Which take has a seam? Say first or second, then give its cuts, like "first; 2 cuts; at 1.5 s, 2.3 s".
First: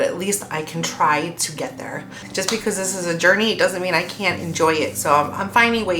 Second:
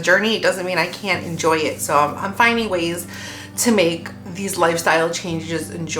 first; 1 cut; at 2.3 s